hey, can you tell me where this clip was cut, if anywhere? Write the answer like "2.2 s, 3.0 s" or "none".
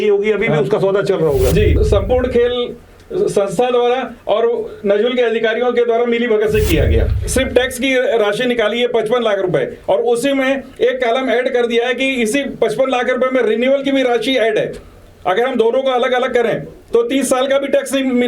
1.8 s, 7.1 s